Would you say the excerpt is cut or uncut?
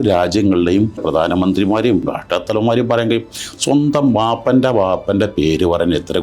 cut